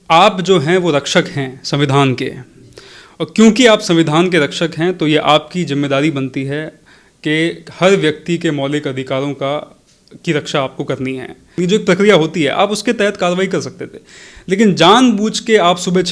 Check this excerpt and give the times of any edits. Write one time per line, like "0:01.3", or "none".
0:11.5